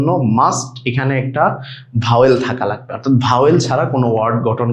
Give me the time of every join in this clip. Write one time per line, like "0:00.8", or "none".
none